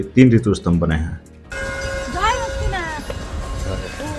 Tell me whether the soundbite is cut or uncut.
cut